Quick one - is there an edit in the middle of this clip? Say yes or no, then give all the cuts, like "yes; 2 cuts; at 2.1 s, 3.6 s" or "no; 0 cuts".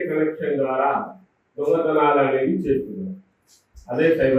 no; 0 cuts